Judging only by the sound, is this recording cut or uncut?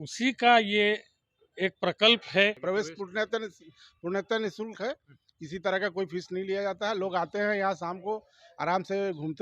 cut